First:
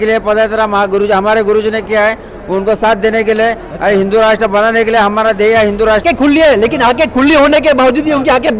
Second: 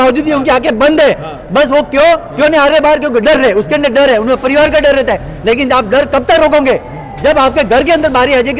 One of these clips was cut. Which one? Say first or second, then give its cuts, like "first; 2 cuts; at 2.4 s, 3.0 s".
first; 1 cut; at 6.0 s